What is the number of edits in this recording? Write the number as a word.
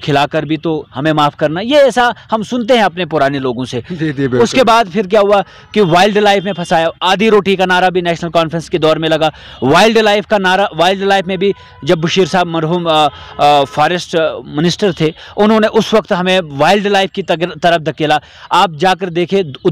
zero